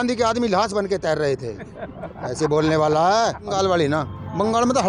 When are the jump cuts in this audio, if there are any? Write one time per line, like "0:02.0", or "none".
0:03.5